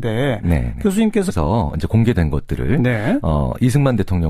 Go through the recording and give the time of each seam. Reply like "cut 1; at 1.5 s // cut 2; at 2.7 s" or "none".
none